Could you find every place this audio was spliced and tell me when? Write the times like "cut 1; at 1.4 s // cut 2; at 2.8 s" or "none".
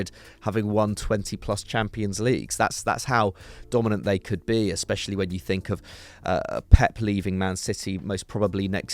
none